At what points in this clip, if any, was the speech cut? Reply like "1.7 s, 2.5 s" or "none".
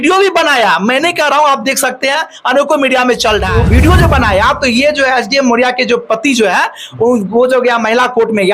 3.6 s